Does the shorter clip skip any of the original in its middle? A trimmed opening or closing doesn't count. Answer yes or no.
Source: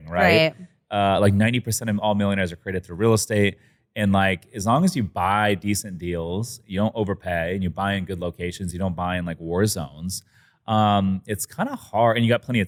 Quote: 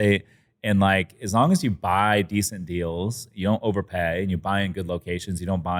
no